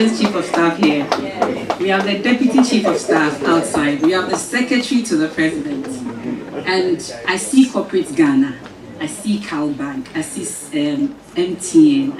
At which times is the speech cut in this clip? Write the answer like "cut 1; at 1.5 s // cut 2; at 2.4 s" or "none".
none